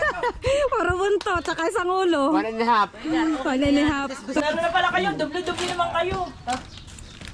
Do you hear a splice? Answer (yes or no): yes